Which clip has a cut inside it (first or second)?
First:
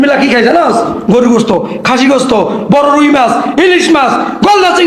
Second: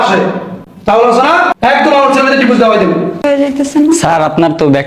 second